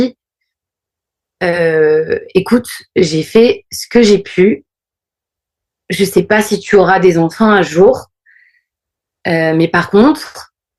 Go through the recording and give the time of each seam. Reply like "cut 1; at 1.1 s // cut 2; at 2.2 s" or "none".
none